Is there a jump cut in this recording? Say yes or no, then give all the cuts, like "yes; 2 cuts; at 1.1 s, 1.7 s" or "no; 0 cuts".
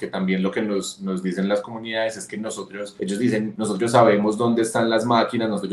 yes; 2 cuts; at 2.8 s, 3.5 s